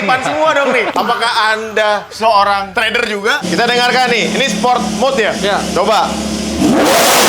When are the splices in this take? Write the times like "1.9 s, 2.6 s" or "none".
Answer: 0.9 s, 3.4 s